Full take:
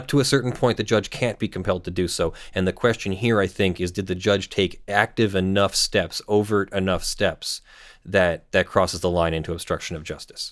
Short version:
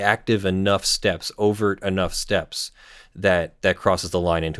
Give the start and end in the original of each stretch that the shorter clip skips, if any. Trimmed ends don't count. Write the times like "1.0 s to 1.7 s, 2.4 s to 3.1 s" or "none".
none